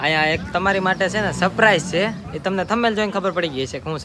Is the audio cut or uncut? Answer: uncut